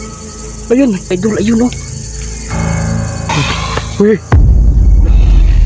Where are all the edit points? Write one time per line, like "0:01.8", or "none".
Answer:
0:01.1